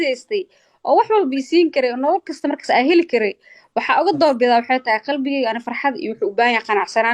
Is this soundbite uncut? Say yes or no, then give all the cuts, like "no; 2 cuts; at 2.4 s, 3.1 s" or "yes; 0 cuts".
yes; 0 cuts